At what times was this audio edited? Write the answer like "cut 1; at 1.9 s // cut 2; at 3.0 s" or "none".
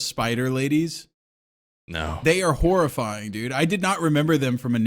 none

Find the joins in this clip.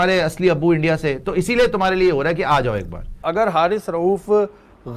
cut 1; at 3.2 s

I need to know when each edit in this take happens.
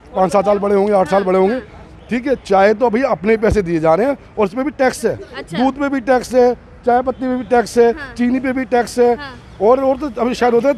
none

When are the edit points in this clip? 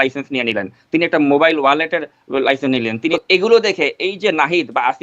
cut 1; at 3.1 s

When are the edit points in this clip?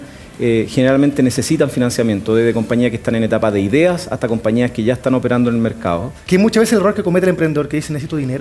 cut 1; at 6.1 s

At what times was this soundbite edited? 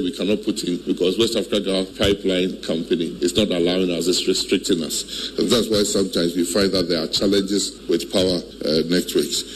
cut 1; at 0.8 s // cut 2; at 1.9 s // cut 3; at 3.1 s // cut 4; at 8.1 s

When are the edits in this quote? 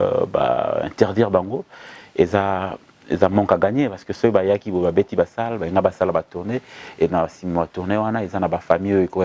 none

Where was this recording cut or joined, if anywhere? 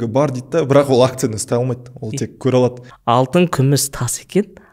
cut 1; at 2.9 s

